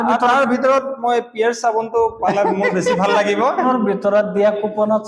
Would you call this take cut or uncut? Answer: cut